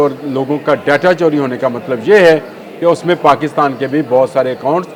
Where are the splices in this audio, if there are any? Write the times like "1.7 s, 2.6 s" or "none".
none